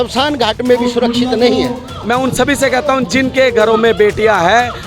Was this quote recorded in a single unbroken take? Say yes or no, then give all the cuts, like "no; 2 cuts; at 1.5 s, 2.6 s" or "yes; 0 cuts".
no; 1 cut; at 1.9 s